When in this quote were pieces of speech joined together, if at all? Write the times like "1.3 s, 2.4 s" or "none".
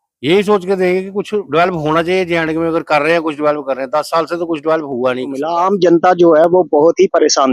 5.5 s